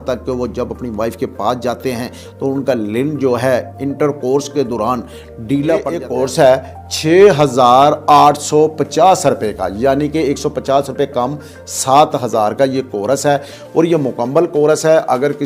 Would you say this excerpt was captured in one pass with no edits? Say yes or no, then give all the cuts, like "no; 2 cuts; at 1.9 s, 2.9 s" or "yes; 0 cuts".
no; 1 cut; at 5.8 s